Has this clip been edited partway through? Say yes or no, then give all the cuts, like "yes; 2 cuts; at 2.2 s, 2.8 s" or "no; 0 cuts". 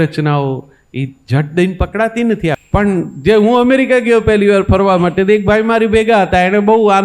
yes; 1 cut; at 2.6 s